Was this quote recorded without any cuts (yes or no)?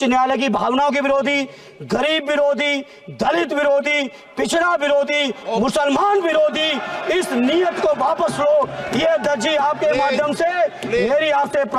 yes